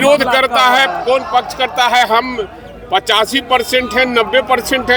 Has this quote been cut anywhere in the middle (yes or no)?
no